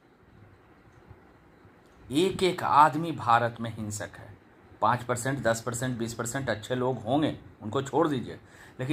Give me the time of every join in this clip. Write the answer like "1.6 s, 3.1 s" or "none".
none